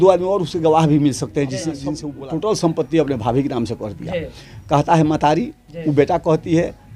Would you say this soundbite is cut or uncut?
cut